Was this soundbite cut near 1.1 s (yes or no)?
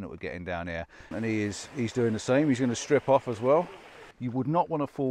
yes